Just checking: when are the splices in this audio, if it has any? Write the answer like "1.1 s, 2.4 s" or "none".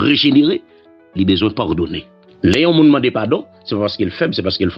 2.2 s